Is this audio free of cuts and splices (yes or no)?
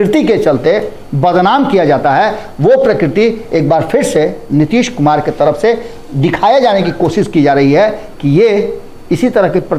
yes